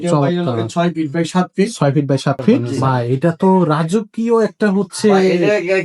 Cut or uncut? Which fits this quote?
cut